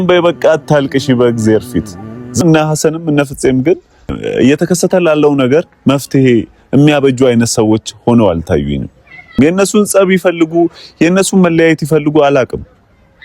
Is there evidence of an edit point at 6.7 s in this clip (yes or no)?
no